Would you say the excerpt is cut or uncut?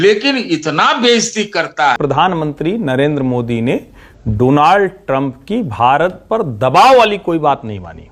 cut